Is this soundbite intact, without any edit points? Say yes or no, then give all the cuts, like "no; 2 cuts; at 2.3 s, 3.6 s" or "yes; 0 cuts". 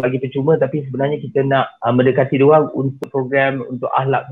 no; 2 cuts; at 1.7 s, 3.0 s